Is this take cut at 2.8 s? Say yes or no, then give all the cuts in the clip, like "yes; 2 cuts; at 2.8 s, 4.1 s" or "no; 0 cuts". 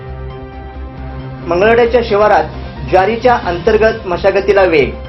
no; 1 cut; at 0.9 s